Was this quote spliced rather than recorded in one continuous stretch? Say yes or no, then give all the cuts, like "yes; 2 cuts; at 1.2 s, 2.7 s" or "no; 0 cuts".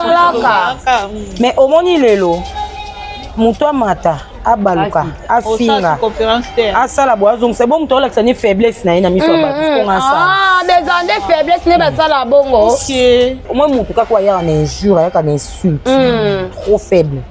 yes; 1 cut; at 13.4 s